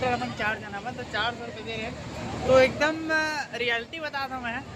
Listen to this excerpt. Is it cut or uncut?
uncut